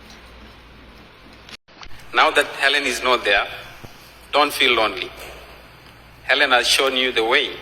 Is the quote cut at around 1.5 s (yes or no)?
yes